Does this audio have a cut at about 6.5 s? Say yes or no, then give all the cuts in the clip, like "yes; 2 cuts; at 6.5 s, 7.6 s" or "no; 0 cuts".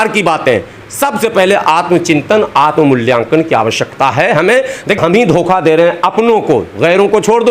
no; 1 cut; at 5.0 s